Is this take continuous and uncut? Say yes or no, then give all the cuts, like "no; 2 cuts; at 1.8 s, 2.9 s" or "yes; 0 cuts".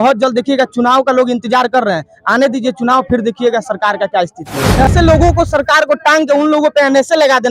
no; 1 cut; at 4.9 s